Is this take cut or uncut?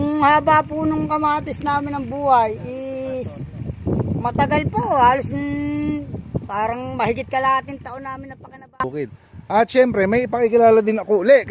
cut